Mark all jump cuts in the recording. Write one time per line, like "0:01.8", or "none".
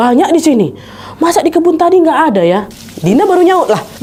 none